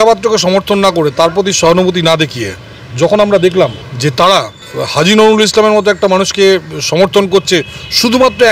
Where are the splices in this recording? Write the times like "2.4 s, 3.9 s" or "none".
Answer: 3.9 s, 4.6 s